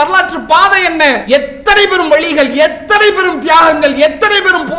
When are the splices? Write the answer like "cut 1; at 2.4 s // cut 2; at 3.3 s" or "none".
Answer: cut 1; at 1.2 s